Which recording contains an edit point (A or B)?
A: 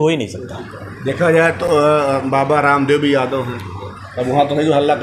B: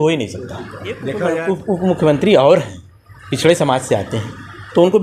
B